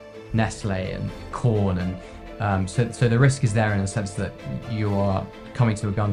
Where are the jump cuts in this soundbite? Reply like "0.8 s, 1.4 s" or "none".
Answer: none